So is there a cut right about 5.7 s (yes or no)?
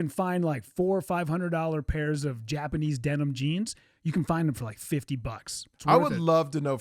yes